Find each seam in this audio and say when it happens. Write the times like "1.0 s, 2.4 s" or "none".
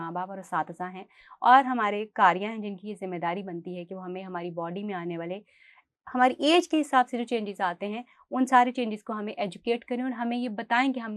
none